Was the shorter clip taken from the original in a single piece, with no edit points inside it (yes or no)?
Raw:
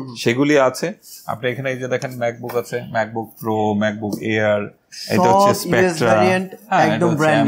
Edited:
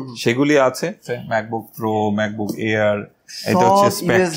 no